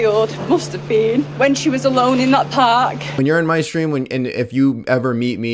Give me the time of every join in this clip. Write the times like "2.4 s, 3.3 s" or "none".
1.3 s, 3.1 s